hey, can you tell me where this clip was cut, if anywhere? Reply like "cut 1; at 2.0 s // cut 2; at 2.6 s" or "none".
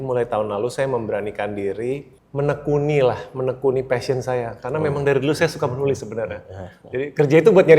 cut 1; at 2.2 s